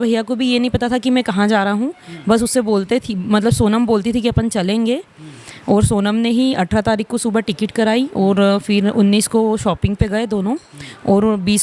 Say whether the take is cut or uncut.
uncut